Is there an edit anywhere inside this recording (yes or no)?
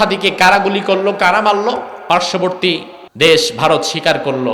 yes